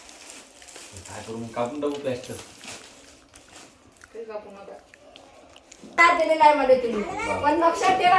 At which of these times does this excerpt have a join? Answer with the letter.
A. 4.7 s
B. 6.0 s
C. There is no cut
B